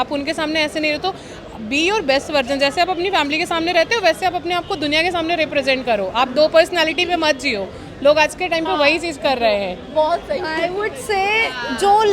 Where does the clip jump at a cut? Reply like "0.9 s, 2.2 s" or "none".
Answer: none